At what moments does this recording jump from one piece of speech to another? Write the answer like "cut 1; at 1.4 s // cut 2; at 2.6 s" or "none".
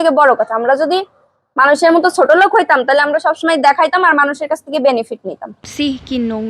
cut 1; at 5.5 s

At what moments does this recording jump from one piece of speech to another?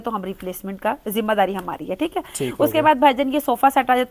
none

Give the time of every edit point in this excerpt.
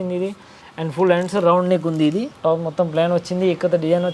cut 1; at 2.3 s

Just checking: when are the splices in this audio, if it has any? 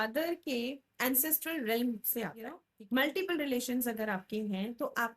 cut 1; at 2.7 s

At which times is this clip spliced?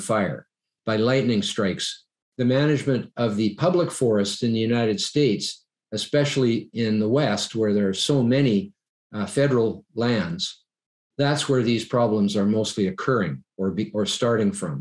cut 1; at 2.2 s

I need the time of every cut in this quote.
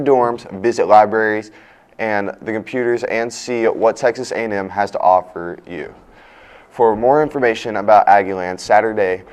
none

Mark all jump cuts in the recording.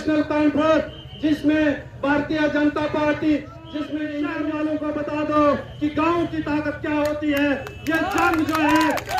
cut 1; at 4.3 s

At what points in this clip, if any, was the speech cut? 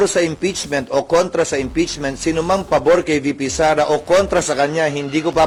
none

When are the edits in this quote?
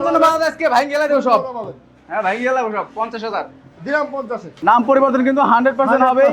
cut 1; at 4.5 s

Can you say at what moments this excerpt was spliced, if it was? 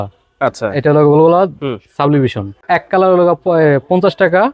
cut 1; at 2.6 s

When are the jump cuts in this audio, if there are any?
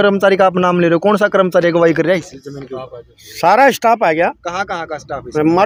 none

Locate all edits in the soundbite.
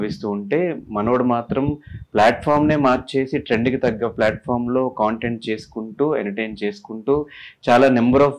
none

